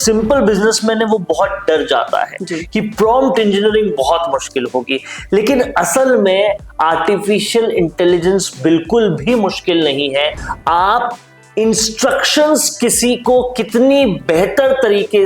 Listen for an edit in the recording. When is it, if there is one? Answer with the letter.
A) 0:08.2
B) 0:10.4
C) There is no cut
B